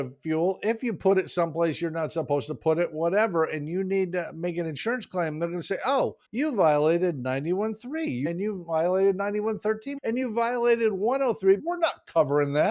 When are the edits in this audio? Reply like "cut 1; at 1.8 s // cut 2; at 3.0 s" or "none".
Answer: cut 1; at 6.2 s // cut 2; at 8.3 s // cut 3; at 9.9 s // cut 4; at 11.7 s